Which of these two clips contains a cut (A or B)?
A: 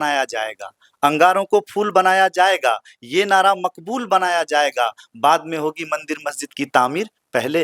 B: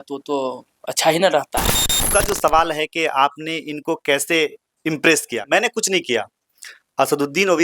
B